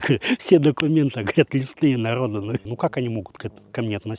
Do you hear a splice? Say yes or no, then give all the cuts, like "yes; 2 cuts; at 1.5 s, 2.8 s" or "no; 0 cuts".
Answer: yes; 1 cut; at 2.7 s